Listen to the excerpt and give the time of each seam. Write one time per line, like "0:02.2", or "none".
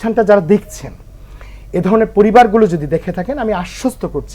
none